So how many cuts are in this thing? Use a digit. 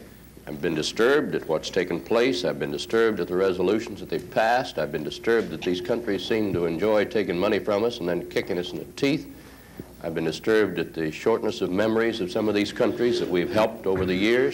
0